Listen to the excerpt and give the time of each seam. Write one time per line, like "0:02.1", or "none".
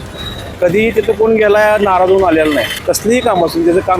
0:02.7